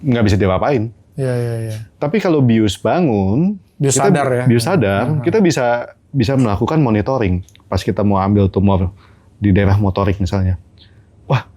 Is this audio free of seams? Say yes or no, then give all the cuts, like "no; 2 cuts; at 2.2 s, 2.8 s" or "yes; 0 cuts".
no; 1 cut; at 1.9 s